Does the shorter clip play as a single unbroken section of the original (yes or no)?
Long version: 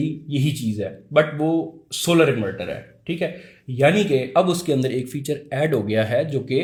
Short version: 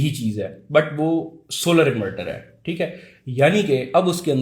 yes